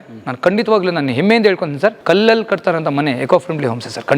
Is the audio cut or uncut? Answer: cut